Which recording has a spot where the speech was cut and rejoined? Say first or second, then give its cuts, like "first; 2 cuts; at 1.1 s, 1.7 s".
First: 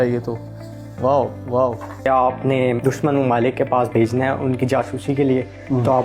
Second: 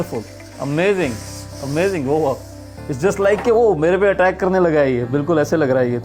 first; 1 cut; at 1.9 s